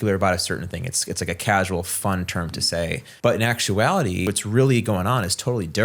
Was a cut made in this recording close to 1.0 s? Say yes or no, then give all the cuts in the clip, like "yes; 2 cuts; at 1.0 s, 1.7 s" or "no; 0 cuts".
no; 2 cuts; at 3.1 s, 4.2 s